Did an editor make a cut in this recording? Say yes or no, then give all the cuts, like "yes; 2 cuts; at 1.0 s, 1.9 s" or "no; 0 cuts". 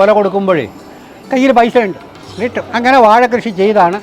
no; 0 cuts